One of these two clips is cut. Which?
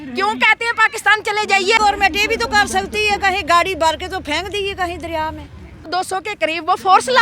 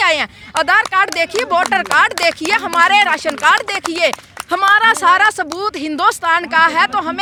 first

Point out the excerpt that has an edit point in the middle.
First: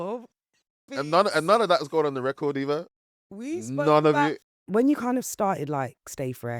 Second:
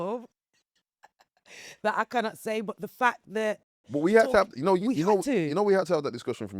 first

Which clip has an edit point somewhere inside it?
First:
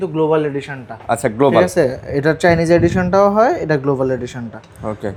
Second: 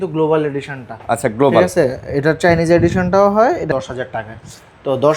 second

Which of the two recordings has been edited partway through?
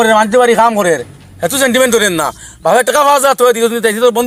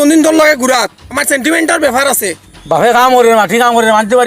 second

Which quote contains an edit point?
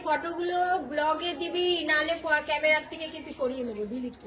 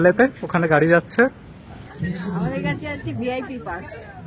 second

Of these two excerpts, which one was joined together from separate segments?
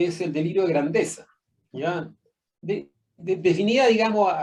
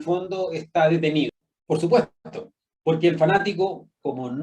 second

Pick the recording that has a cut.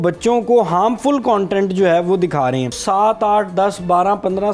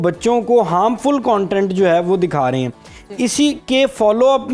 first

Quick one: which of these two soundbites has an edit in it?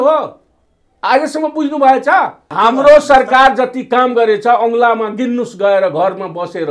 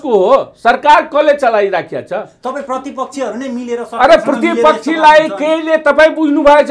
first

